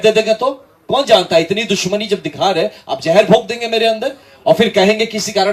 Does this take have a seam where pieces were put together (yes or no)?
no